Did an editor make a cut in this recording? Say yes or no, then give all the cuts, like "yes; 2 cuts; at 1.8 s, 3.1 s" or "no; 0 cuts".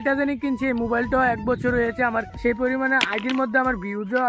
yes; 1 cut; at 2.3 s